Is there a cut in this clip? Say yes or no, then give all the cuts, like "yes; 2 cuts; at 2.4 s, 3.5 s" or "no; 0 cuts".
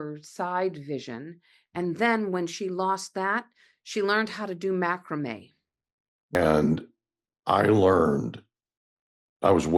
yes; 1 cut; at 6.4 s